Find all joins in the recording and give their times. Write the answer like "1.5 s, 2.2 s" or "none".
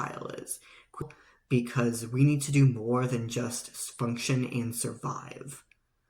1.0 s